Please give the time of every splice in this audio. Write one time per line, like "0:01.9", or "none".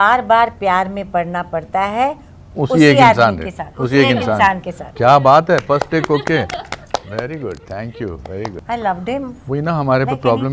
0:08.6